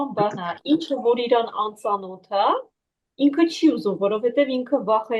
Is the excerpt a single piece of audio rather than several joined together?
yes; 0 cuts

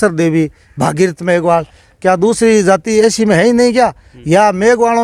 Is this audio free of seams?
yes; 0 cuts

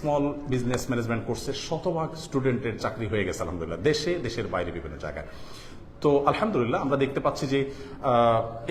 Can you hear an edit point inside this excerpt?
no; 0 cuts

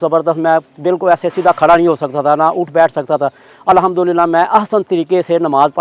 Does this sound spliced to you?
no; 0 cuts

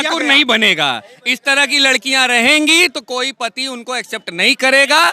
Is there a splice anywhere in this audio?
no; 0 cuts

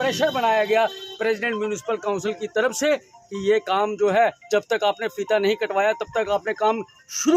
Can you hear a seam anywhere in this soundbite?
no; 0 cuts

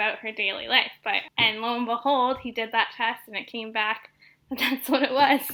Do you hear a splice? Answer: no; 0 cuts

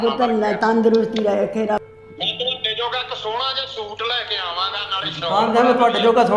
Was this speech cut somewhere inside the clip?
yes; 1 cut; at 1.8 s

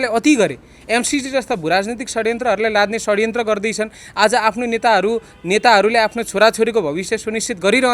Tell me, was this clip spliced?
no; 0 cuts

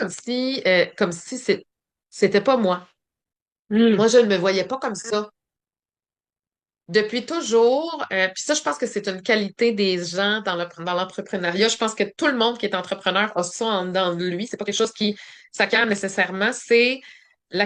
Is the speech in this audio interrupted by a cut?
no; 0 cuts

